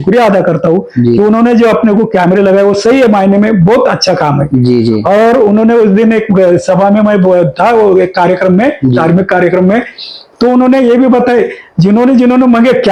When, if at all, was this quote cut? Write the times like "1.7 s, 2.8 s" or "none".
none